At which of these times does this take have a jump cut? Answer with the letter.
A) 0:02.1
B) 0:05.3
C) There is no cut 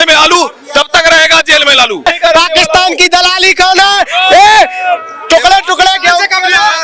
A